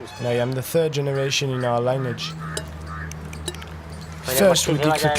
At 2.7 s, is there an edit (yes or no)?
yes